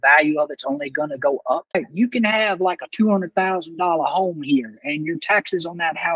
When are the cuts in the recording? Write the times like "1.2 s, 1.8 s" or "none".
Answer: 1.8 s